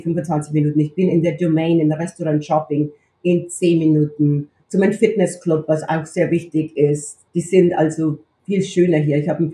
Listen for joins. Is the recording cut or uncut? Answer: cut